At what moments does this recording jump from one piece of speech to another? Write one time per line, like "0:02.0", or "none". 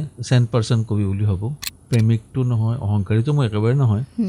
0:01.6